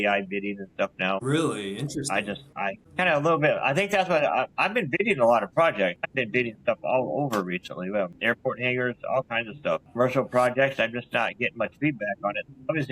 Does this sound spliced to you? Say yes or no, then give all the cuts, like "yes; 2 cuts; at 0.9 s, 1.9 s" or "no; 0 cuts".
yes; 4 cuts; at 2.5 s, 6.0 s, 8.2 s, 9.9 s